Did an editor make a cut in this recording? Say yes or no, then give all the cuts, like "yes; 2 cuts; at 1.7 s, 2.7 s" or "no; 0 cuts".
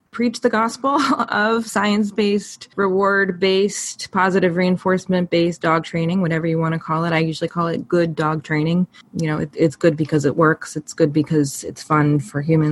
yes; 2 cuts; at 2.6 s, 9.0 s